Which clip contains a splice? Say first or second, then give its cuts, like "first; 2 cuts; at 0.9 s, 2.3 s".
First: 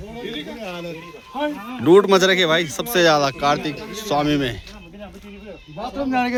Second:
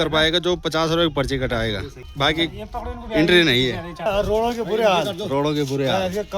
second; 2 cuts; at 2.0 s, 4.1 s